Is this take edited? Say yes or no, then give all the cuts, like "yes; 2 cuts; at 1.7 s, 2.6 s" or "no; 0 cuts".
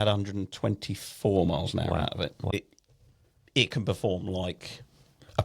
yes; 1 cut; at 2.5 s